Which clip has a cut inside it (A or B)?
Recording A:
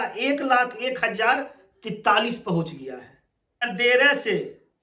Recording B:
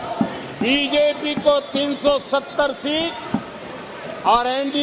A